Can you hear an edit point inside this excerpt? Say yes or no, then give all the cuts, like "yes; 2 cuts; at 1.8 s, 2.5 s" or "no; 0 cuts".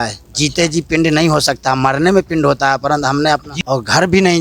yes; 1 cut; at 3.5 s